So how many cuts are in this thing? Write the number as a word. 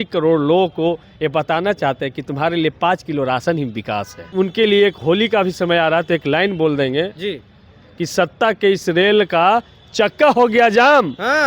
one